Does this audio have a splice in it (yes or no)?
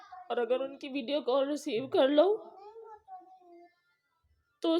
no